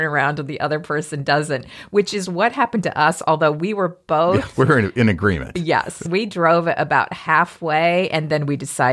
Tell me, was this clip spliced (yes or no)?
yes